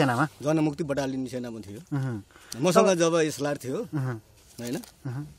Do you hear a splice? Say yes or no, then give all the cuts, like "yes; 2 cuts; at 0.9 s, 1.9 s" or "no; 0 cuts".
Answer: no; 0 cuts